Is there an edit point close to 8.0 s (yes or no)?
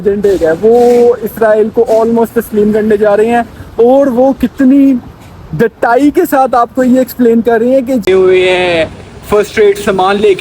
yes